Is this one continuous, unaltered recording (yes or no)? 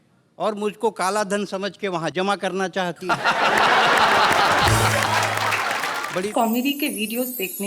no